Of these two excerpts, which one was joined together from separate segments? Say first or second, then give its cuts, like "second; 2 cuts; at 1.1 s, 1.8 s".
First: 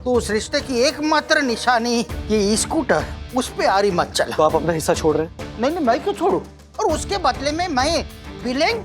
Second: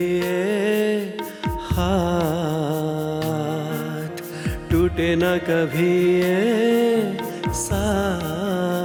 first; 2 cuts; at 4.3 s, 6.6 s